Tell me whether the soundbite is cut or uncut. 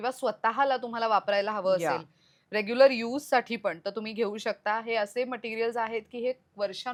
uncut